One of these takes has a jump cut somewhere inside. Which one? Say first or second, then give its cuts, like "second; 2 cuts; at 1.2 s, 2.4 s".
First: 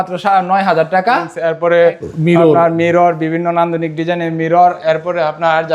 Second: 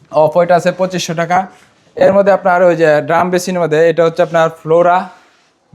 first; 1 cut; at 1.4 s